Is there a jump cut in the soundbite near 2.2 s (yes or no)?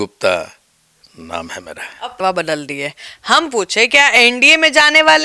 yes